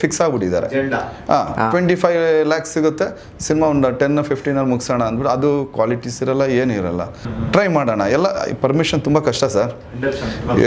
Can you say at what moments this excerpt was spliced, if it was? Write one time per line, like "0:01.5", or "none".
0:07.2